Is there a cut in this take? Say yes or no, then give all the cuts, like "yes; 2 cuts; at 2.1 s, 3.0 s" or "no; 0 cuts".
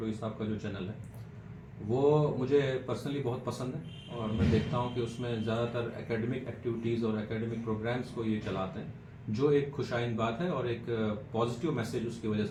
no; 0 cuts